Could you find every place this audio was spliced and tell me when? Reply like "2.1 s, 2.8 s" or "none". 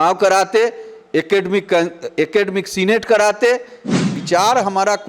4.1 s